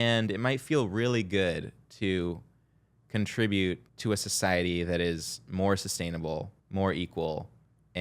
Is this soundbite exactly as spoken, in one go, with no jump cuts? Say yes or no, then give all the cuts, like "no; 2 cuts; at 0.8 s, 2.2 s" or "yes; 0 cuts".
no; 2 cuts; at 3.9 s, 6.6 s